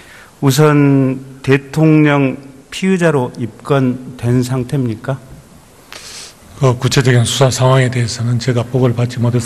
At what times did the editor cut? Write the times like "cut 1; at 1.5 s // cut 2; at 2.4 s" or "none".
none

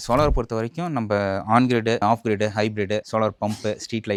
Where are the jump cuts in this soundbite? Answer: none

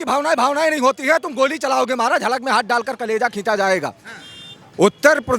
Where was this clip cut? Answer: none

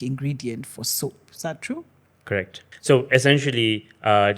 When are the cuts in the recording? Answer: cut 1; at 2.7 s

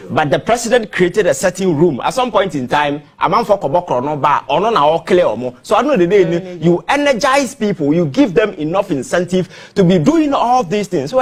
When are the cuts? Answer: none

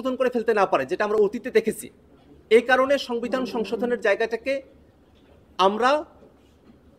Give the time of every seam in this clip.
none

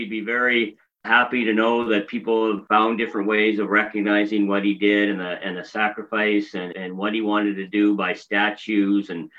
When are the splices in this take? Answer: cut 1; at 1.1 s // cut 2; at 2.6 s // cut 3; at 6.7 s

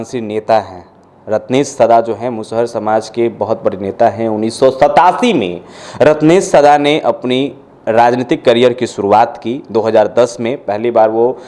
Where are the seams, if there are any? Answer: none

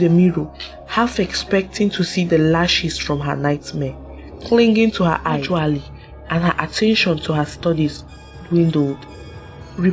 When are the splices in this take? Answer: cut 1; at 5.4 s

